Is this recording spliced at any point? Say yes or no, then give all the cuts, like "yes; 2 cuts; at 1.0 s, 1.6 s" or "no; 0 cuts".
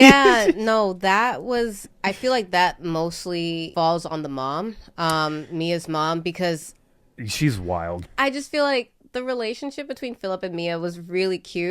yes; 1 cut; at 8.1 s